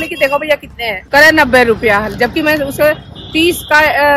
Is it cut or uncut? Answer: uncut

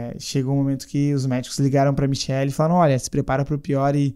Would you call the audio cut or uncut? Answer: uncut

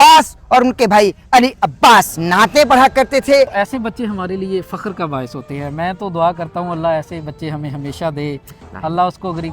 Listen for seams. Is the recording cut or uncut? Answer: cut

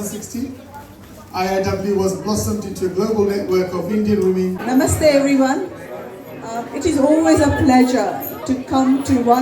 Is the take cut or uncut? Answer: cut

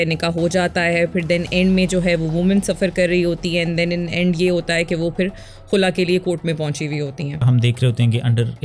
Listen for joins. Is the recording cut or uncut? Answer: cut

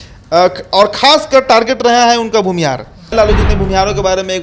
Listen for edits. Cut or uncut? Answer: cut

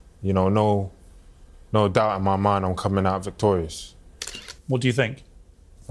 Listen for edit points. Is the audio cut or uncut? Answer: cut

